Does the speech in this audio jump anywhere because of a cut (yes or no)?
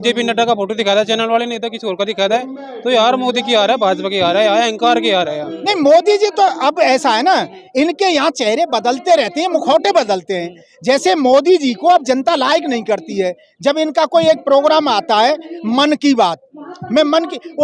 yes